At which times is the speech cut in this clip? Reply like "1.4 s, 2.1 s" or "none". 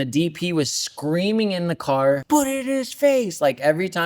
2.2 s